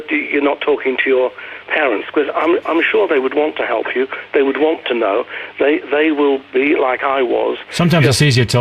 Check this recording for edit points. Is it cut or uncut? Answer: cut